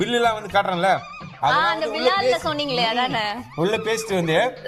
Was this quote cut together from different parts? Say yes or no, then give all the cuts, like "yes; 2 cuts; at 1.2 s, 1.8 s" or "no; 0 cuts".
no; 0 cuts